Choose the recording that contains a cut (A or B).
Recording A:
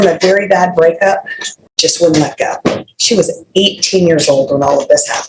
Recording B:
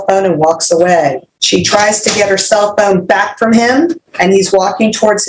B